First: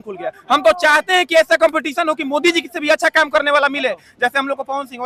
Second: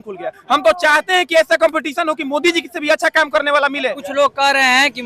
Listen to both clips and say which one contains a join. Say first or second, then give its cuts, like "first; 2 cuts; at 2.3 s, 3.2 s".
second; 1 cut; at 4.0 s